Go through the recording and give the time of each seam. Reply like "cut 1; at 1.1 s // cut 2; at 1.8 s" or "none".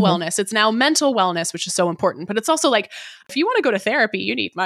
cut 1; at 3.2 s